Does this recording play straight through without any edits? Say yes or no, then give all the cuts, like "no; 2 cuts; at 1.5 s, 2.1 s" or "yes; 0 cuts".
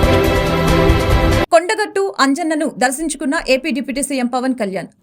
no; 1 cut; at 1.4 s